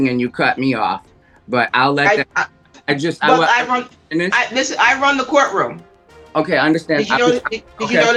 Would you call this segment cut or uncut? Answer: uncut